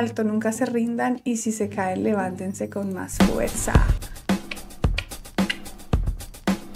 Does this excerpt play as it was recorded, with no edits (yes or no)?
yes